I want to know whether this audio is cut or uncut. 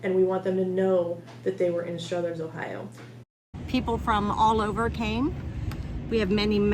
cut